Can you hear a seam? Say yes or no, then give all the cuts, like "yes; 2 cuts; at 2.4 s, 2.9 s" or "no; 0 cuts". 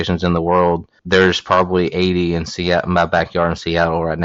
yes; 1 cut; at 1.0 s